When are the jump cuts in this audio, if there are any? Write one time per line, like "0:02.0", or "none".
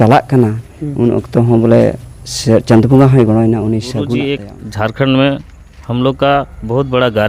0:04.1